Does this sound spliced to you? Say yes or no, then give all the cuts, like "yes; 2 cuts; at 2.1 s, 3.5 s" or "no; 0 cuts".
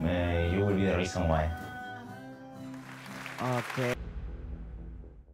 yes; 1 cut; at 3.9 s